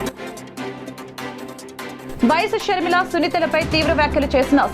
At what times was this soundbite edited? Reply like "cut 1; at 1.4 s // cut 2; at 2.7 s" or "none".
cut 1; at 1.4 s